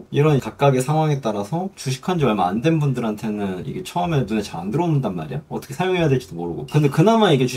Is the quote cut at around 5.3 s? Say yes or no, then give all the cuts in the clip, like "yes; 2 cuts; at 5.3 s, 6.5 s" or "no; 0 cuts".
no; 2 cuts; at 1.8 s, 6.7 s